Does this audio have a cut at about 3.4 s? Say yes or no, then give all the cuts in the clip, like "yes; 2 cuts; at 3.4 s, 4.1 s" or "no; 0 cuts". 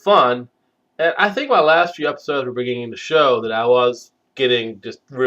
yes; 1 cut; at 3.4 s